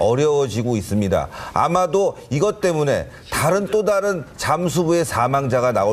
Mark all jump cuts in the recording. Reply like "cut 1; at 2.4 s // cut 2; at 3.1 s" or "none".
cut 1; at 1.4 s